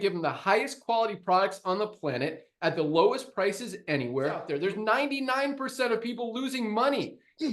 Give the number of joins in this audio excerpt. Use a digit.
1